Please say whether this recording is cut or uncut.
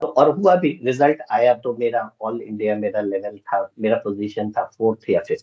uncut